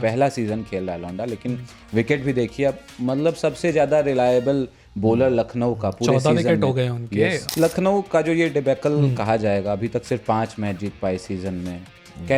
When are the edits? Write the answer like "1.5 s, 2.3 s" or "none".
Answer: 7.4 s